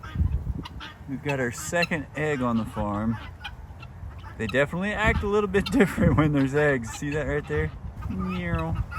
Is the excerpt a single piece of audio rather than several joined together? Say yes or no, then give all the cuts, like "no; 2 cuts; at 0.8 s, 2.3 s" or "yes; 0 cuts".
no; 1 cut; at 7.9 s